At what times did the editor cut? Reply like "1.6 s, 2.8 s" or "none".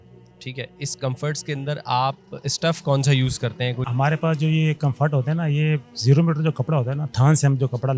3.8 s